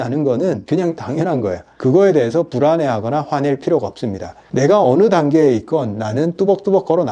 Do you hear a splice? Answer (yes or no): no